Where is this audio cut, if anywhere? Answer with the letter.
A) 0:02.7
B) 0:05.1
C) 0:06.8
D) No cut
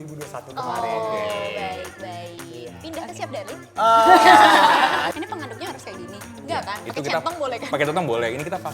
B